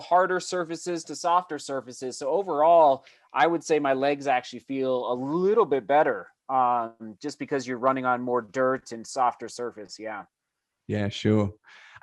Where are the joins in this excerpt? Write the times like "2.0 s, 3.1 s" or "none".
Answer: none